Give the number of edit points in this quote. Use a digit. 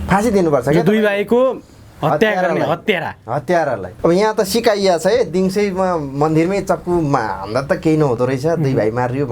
1